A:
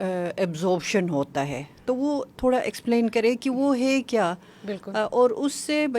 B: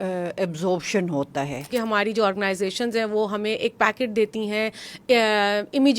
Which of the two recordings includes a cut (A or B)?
B